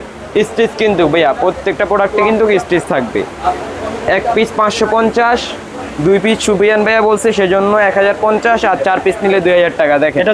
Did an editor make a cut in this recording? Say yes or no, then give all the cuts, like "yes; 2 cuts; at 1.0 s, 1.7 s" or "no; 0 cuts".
no; 0 cuts